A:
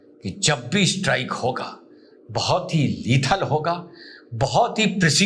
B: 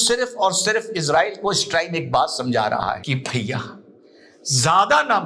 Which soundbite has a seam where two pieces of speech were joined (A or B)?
B